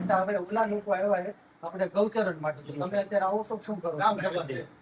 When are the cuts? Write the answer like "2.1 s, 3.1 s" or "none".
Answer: none